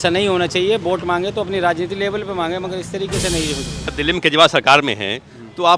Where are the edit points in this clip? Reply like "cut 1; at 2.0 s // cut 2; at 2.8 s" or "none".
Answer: cut 1; at 3.8 s